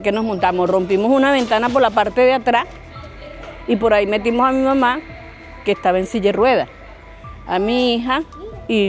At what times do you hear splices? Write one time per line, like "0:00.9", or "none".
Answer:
none